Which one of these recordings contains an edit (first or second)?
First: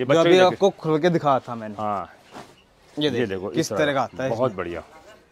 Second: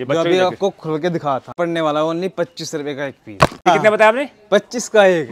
second